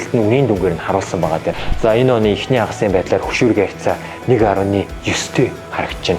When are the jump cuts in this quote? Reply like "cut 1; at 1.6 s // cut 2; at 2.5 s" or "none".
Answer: cut 1; at 1.6 s